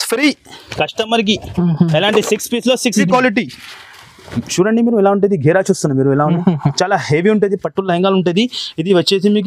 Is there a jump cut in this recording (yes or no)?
yes